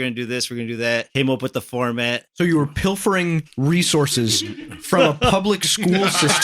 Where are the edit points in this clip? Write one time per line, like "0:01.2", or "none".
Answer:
0:01.1